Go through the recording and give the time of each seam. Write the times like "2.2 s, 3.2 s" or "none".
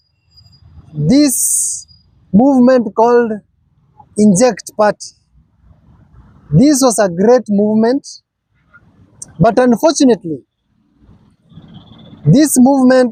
none